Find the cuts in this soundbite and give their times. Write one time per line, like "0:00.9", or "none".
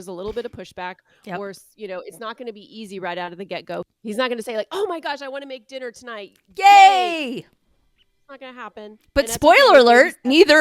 none